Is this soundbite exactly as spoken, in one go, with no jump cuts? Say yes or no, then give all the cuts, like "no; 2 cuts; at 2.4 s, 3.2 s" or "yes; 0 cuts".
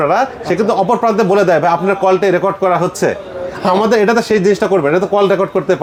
yes; 0 cuts